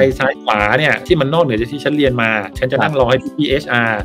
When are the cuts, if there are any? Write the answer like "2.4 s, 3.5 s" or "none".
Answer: 1.0 s, 2.8 s